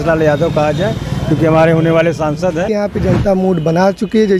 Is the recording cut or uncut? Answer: cut